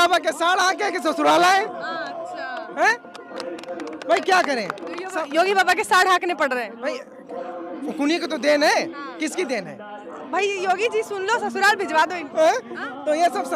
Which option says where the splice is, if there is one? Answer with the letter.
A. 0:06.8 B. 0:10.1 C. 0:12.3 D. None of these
B